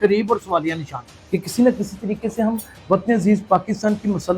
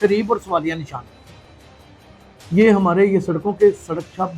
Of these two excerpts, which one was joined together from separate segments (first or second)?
first